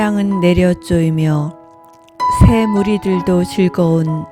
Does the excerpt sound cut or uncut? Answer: uncut